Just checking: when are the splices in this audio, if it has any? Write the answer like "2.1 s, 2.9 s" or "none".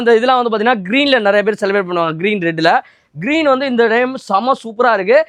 none